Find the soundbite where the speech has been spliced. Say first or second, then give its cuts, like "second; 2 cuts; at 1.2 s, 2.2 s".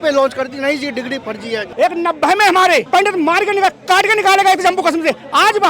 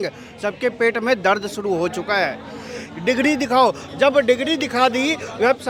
first; 2 cuts; at 1.6 s, 2.9 s